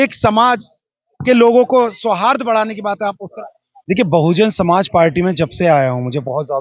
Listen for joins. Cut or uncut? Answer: cut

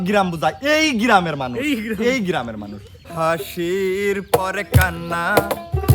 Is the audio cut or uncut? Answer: cut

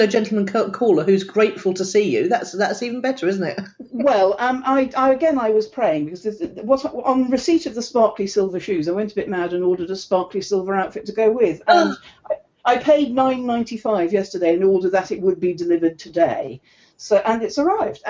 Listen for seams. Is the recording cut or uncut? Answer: uncut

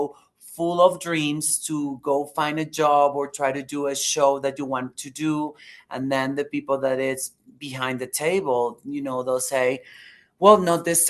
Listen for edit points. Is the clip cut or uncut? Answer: uncut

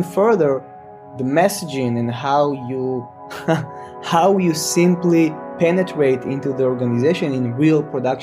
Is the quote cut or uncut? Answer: uncut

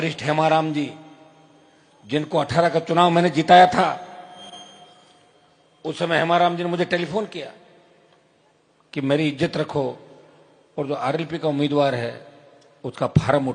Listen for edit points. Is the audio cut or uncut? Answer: uncut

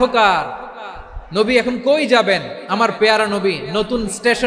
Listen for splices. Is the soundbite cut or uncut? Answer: uncut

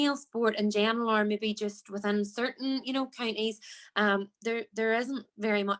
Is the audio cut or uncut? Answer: uncut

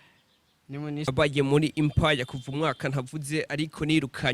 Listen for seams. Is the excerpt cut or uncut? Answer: cut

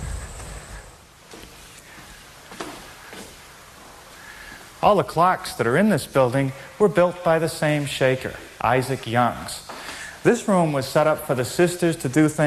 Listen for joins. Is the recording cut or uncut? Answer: cut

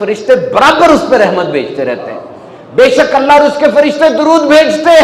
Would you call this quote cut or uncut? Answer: uncut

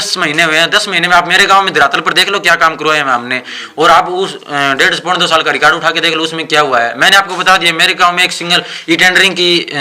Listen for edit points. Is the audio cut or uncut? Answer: uncut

